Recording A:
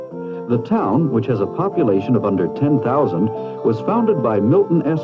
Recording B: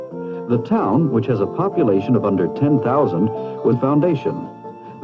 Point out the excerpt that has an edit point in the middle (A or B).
A